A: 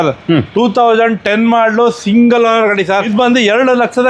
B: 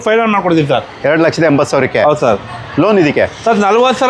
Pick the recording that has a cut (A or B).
A